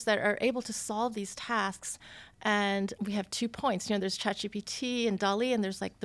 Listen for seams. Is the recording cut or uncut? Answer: cut